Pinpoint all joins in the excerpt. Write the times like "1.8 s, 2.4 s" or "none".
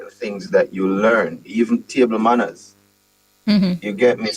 none